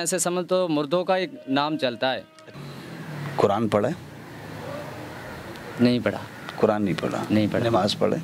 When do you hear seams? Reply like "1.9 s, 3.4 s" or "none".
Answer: 2.5 s

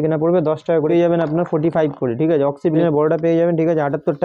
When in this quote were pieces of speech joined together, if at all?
0.9 s, 2.8 s

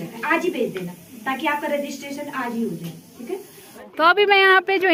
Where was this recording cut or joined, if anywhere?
none

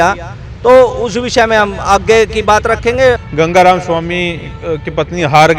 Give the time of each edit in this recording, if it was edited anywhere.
3.2 s

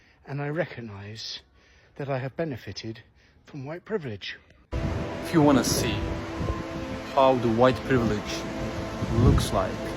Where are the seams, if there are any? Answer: 4.8 s

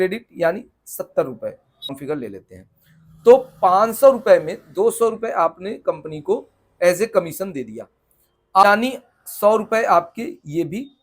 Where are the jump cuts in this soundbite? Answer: 2.0 s, 8.6 s

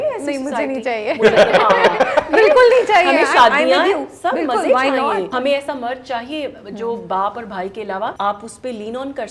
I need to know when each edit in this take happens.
5.3 s, 8.1 s

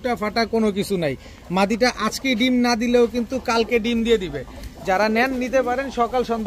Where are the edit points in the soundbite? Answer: none

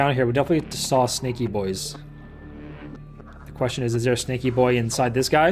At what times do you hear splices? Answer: none

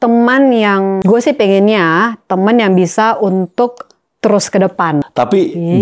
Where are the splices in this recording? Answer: 1.0 s, 5.0 s

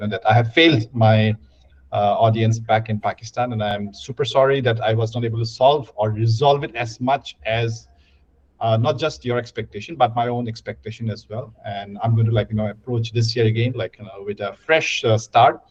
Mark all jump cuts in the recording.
none

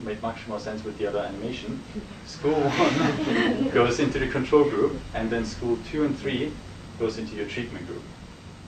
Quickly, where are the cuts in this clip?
1.1 s

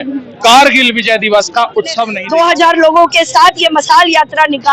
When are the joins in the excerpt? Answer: 2.1 s

